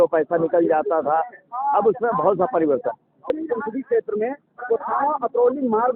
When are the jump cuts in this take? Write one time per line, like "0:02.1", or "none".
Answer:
0:03.3